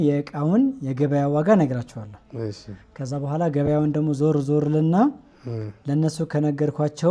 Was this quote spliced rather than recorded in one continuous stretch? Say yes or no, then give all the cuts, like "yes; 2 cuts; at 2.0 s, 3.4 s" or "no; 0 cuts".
no; 0 cuts